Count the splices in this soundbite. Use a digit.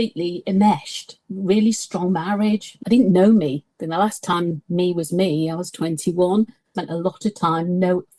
3